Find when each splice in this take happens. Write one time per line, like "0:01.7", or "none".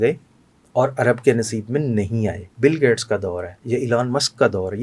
0:02.5